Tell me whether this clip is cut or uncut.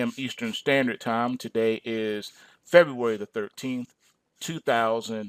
uncut